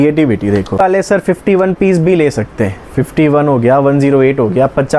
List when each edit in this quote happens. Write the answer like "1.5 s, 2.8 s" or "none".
1.0 s